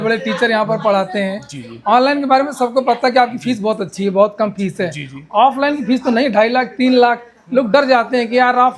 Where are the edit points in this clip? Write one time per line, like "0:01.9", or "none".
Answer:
none